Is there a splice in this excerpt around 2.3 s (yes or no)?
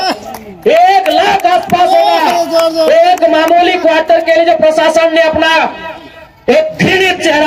no